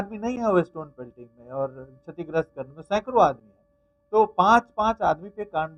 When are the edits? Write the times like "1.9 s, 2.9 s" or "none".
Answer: none